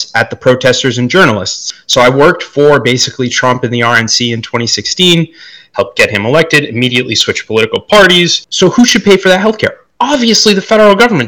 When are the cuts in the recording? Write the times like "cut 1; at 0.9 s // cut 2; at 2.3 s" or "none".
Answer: cut 1; at 1.7 s // cut 2; at 8.4 s

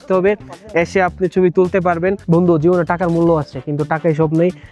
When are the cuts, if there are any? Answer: cut 1; at 2.2 s

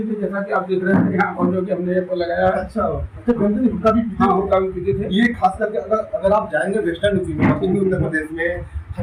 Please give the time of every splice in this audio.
none

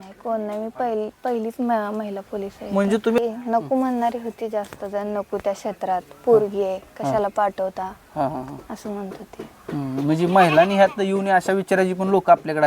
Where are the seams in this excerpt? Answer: cut 1; at 3.2 s

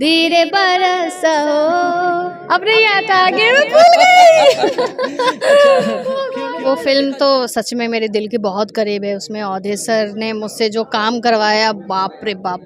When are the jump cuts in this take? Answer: cut 1; at 6.3 s

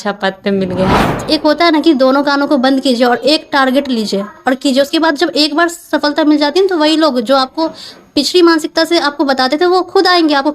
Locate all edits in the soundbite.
cut 1; at 1.2 s

